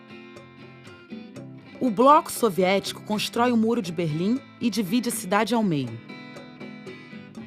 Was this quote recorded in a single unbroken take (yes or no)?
yes